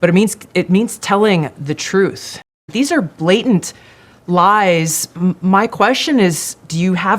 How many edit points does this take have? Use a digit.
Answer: 1